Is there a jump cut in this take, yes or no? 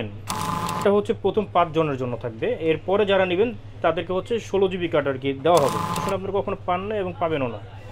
yes